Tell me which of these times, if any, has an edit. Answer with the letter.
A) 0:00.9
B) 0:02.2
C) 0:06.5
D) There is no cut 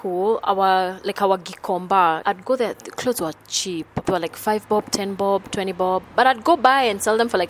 B